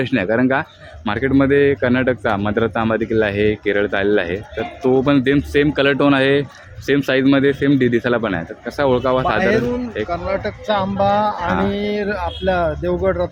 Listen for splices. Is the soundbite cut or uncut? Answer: uncut